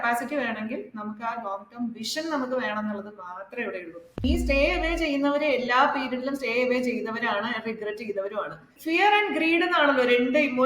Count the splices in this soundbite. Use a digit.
2